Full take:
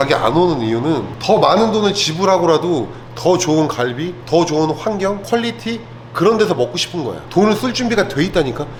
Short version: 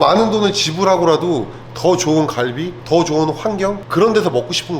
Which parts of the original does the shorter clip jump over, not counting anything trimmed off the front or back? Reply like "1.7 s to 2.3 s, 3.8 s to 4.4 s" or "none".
5.2 s to 6.0 s